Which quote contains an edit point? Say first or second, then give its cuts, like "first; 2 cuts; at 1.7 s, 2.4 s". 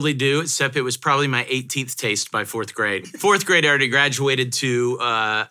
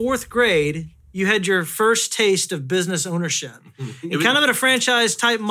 first; 1 cut; at 3.0 s